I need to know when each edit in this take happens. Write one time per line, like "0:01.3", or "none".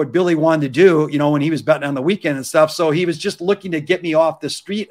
none